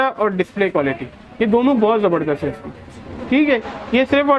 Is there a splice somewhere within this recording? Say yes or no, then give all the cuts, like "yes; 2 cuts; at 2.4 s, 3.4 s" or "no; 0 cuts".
no; 0 cuts